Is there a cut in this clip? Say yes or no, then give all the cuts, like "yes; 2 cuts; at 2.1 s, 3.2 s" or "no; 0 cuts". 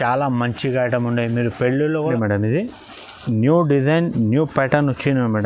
yes; 1 cut; at 2.0 s